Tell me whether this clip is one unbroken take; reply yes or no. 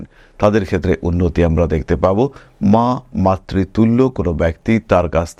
yes